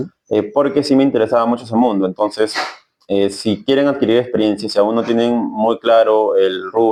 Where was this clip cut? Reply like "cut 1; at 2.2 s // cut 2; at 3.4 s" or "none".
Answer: none